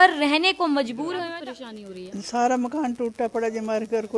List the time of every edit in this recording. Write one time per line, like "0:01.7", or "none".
0:01.2